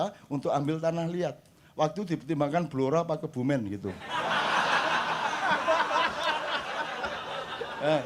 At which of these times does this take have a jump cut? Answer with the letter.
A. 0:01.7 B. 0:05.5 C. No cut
C